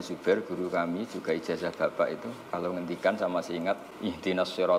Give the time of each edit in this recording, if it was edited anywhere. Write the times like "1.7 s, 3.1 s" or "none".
3.9 s